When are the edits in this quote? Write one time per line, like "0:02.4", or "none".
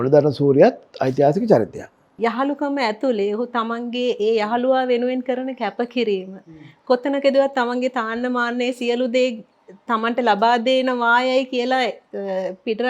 0:02.1